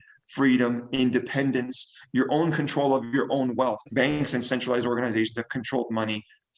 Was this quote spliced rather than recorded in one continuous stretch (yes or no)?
yes